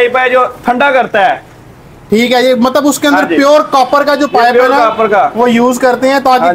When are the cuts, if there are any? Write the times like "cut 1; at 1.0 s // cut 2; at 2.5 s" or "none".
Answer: none